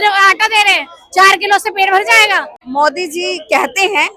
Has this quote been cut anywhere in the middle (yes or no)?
yes